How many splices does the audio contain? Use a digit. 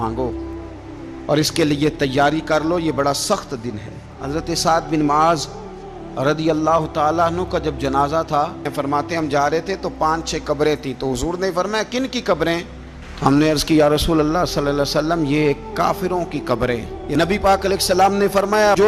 3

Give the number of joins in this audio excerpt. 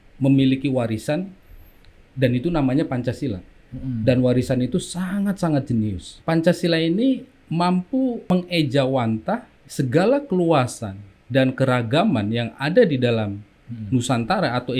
4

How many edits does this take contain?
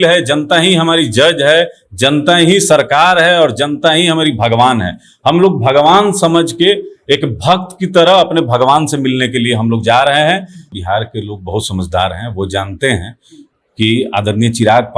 1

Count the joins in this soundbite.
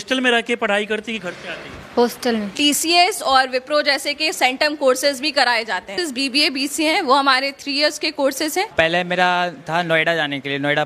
3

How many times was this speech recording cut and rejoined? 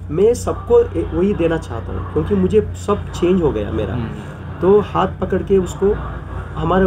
0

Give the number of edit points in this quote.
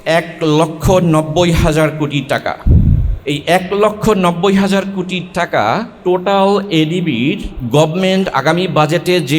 3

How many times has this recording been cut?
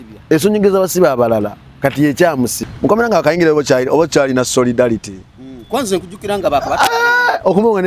1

